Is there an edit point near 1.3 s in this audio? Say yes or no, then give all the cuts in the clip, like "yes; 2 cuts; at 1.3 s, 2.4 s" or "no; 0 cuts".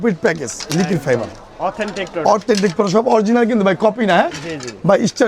no; 0 cuts